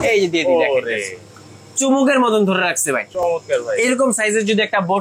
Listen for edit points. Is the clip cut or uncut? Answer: uncut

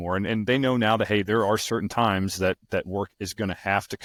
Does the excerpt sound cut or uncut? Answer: uncut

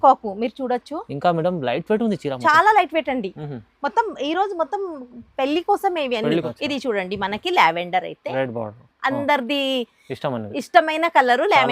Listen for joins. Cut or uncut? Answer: cut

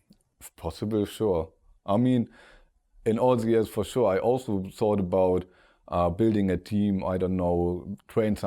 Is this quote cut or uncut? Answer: uncut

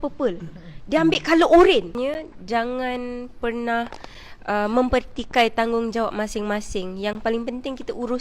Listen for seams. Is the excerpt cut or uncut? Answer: cut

